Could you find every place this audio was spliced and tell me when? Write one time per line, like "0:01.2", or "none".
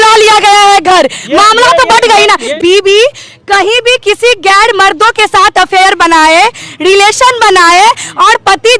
0:02.5